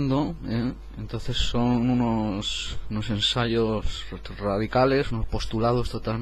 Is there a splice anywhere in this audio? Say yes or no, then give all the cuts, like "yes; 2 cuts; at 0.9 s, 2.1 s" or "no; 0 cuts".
no; 0 cuts